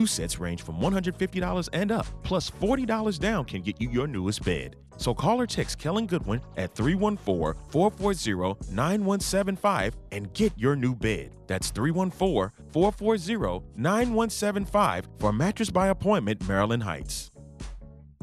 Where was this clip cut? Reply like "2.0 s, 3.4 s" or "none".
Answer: none